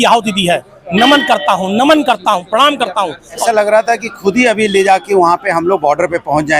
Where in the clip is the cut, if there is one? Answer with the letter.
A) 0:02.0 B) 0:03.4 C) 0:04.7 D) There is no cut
B